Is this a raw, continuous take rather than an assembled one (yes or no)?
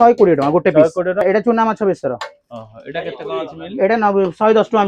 no